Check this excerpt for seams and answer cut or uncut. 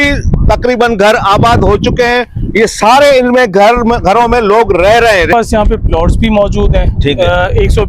cut